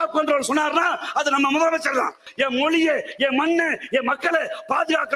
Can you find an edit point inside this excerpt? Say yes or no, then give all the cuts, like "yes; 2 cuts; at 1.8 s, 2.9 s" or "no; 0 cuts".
yes; 1 cut; at 2.2 s